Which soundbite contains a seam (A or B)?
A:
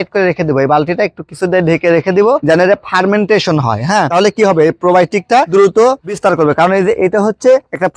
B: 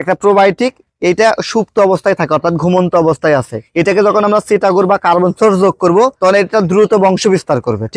A